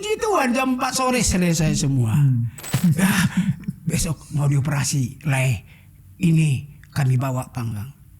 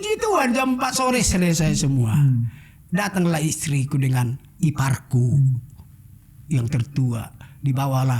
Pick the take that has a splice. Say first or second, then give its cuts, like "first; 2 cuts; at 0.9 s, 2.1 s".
first; 1 cut; at 2.8 s